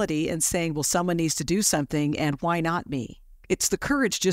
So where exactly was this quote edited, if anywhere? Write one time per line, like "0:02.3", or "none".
0:03.4